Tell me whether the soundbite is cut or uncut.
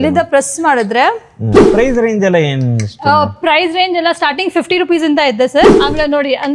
cut